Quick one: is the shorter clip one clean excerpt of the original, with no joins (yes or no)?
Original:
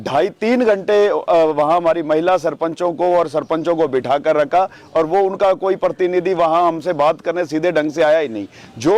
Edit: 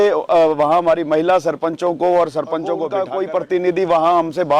no